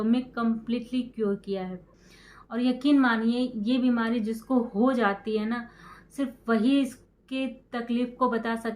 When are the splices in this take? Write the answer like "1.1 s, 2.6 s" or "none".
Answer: 1.8 s